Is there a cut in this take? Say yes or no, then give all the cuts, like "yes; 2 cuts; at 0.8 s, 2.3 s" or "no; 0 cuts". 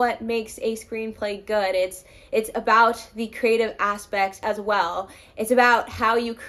no; 0 cuts